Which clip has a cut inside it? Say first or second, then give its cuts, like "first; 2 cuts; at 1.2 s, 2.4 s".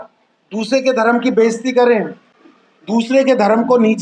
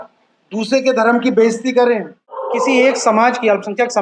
second; 1 cut; at 2.5 s